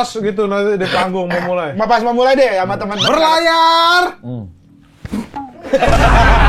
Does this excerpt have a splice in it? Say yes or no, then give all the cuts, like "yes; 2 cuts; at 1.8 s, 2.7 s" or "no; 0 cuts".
no; 0 cuts